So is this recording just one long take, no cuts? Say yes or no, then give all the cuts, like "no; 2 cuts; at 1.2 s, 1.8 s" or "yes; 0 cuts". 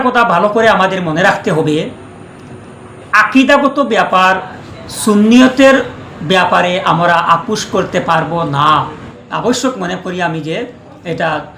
no; 1 cut; at 9.1 s